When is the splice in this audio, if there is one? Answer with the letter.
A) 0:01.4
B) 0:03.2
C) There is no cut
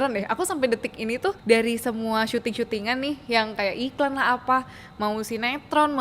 A